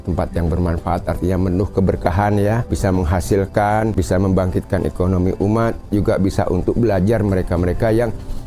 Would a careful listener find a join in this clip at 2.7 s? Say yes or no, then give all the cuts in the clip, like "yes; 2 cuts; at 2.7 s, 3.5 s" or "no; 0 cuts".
yes; 2 cuts; at 2.7 s, 4.0 s